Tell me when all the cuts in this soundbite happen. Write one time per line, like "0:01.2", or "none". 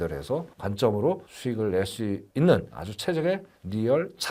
none